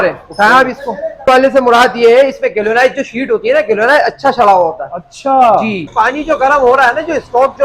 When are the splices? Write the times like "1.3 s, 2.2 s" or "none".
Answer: 1.3 s, 5.9 s